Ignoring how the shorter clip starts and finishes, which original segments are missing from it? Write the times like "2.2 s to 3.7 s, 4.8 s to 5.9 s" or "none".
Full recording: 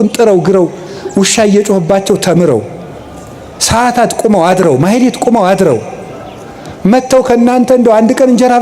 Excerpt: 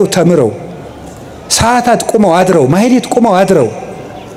none